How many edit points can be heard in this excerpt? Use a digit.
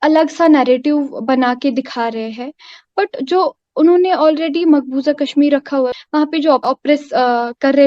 1